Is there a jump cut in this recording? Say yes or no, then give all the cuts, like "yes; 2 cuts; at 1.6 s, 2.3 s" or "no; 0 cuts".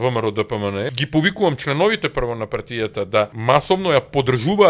yes; 2 cuts; at 0.9 s, 3.4 s